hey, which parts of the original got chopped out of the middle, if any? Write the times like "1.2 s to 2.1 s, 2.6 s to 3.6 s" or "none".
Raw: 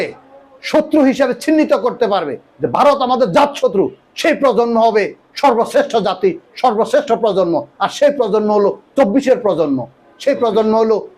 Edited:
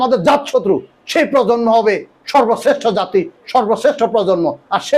none